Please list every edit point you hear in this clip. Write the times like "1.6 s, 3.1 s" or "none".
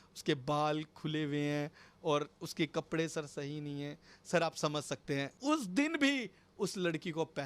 5.3 s